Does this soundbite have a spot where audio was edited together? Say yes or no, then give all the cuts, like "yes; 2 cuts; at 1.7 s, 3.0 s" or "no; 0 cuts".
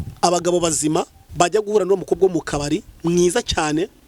yes; 1 cut; at 1.2 s